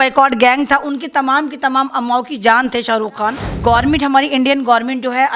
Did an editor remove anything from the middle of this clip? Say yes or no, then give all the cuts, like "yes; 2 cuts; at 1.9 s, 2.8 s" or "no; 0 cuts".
yes; 1 cut; at 3.5 s